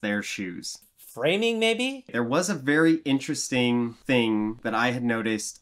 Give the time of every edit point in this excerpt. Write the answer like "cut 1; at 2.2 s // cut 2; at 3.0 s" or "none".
cut 1; at 2.1 s // cut 2; at 4.5 s